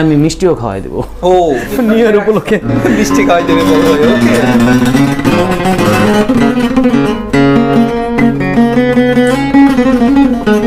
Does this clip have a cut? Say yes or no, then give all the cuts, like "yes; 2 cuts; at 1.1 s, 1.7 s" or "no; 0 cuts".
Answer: no; 0 cuts